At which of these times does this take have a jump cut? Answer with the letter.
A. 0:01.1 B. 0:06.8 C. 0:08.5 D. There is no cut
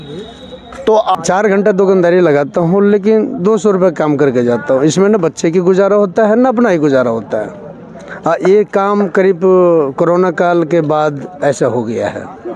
A